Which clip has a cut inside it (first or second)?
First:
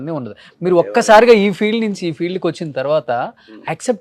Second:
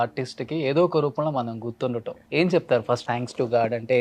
second